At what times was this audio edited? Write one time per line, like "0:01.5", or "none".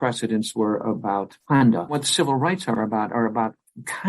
0:01.3
0:02.0